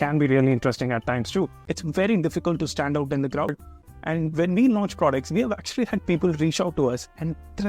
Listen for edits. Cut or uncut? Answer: cut